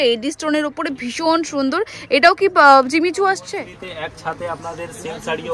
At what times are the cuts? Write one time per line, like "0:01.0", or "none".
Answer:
0:03.8